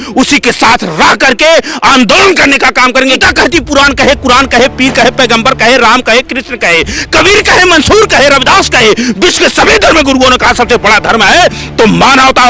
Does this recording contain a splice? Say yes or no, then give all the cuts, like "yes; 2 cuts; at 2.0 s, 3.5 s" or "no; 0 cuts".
yes; 1 cut; at 3.2 s